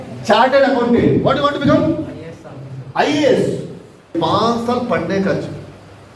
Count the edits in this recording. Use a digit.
1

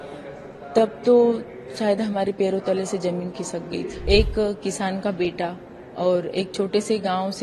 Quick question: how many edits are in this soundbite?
1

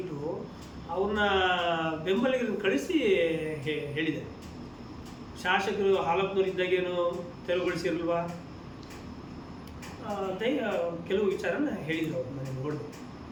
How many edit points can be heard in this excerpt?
0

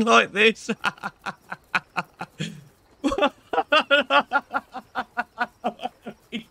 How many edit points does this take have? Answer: 0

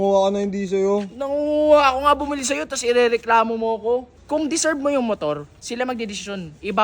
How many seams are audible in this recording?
2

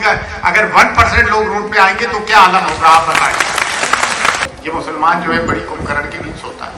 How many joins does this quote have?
1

